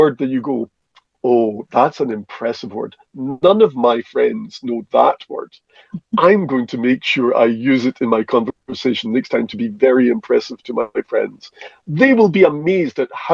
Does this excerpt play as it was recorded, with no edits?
yes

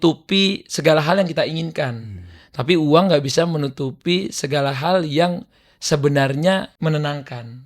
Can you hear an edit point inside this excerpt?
yes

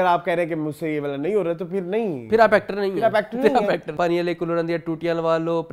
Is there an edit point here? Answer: yes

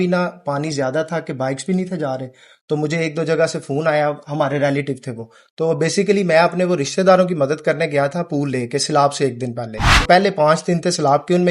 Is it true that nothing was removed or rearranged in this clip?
no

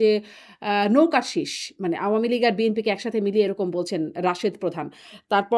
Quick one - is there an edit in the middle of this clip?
no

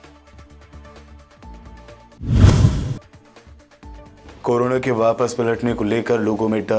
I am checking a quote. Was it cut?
yes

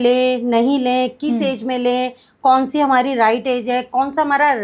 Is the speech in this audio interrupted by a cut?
no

